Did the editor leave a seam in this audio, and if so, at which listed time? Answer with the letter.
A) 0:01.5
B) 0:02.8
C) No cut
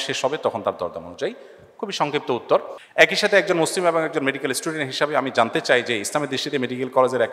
B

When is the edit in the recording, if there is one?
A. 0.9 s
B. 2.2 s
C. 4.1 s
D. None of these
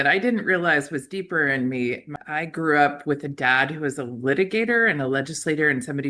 B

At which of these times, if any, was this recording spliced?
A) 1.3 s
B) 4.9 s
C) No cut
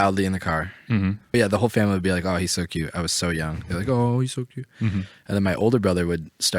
A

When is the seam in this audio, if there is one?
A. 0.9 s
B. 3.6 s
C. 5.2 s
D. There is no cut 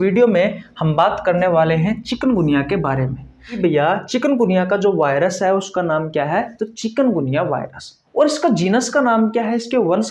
B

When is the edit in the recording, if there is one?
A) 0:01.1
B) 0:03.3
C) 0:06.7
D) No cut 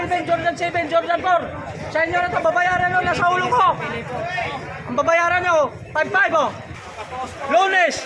C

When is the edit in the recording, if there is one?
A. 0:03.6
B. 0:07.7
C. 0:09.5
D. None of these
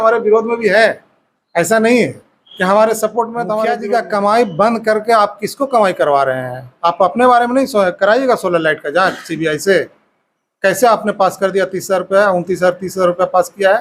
A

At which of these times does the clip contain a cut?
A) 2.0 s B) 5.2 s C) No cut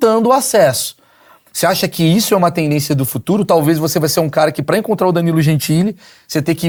C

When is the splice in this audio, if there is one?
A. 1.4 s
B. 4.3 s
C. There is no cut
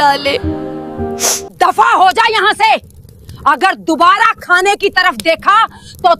A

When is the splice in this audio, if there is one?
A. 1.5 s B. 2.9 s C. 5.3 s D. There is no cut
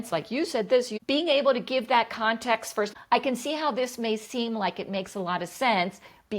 B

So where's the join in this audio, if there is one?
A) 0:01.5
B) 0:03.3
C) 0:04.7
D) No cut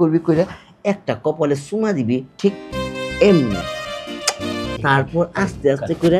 C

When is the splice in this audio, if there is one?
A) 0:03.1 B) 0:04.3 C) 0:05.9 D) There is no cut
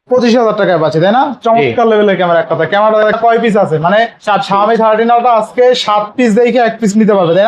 A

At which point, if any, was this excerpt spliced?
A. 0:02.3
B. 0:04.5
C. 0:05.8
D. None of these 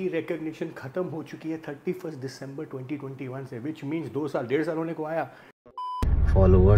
C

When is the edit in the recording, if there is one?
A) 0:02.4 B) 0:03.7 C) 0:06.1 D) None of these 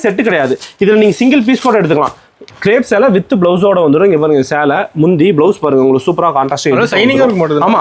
A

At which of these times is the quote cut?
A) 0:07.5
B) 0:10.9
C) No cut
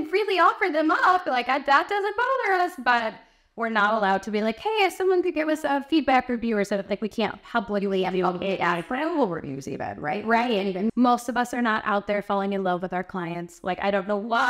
B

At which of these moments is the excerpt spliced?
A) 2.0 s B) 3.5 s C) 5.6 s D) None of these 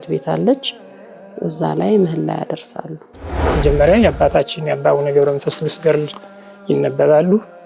B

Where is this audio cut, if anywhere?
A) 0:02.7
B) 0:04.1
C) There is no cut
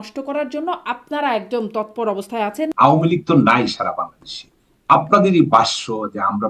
A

